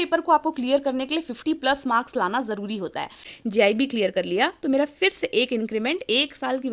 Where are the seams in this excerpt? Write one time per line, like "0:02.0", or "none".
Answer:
0:03.2

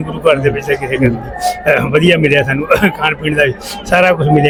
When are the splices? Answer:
none

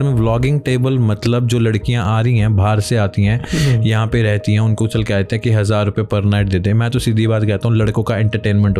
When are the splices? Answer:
none

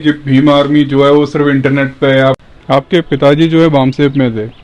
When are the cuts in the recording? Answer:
0:02.4

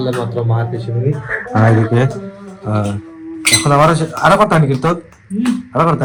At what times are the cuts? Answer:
none

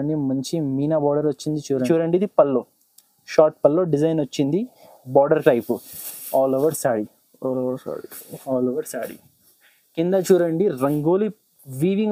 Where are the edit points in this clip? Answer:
0:01.9

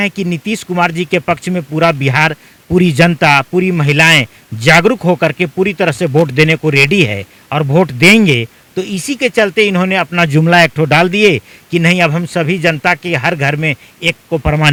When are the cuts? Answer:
none

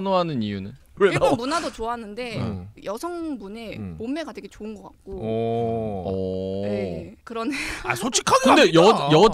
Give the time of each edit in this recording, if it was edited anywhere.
0:01.0

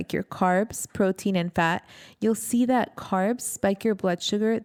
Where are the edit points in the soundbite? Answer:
none

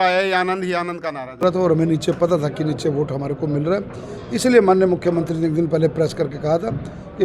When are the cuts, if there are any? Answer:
0:01.4

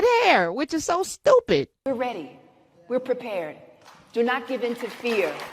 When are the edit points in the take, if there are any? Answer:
0:01.7

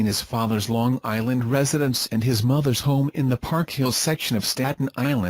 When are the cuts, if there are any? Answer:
none

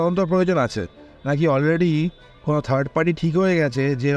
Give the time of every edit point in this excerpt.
none

